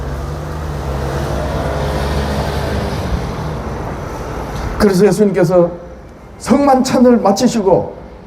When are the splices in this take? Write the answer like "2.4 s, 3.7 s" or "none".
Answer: none